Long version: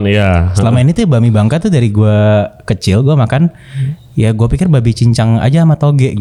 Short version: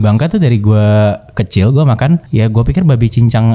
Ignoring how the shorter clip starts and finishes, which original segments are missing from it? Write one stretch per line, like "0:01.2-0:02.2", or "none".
0:03.6-0:04.1